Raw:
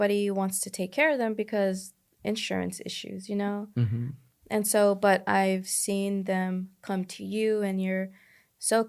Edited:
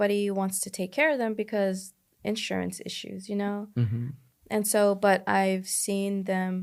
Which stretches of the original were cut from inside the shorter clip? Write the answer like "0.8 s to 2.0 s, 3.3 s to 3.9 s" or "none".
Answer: none